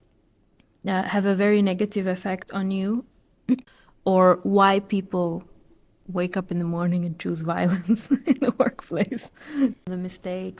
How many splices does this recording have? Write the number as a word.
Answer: two